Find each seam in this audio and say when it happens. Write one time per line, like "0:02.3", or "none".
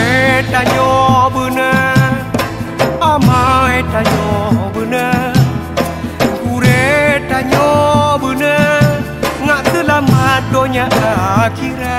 none

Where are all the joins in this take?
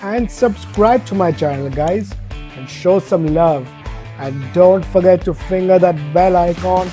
none

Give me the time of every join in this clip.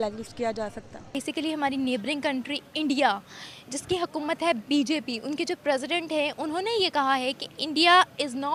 none

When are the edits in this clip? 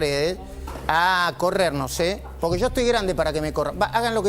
none

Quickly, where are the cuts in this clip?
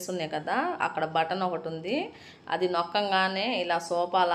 none

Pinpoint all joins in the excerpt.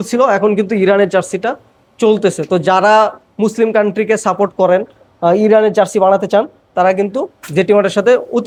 none

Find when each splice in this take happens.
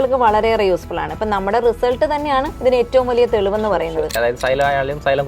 0:02.5
0:04.2

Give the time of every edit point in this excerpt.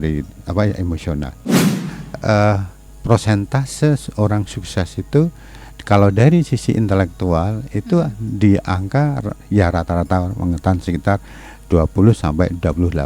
0:01.6

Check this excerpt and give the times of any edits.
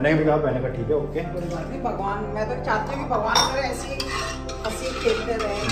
none

